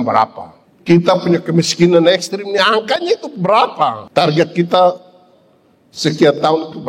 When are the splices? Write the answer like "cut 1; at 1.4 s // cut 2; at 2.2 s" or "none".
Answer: cut 1; at 4.0 s